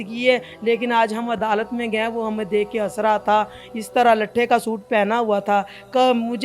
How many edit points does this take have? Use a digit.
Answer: 0